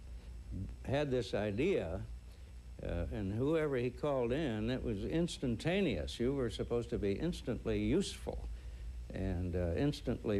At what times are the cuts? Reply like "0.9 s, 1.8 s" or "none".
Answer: none